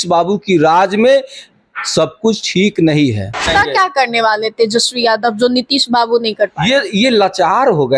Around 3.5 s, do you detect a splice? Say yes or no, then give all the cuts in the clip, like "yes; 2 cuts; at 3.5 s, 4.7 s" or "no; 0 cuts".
yes; 1 cut; at 3.5 s